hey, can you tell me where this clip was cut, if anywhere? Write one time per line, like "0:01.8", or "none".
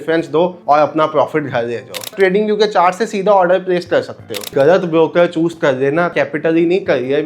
0:02.1
0:04.5
0:06.1